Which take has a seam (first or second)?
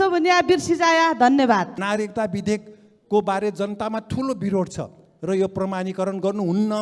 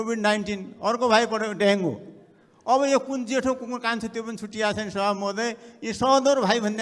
first